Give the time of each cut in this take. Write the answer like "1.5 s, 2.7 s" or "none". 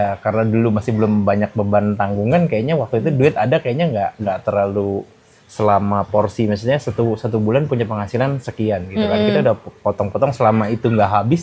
none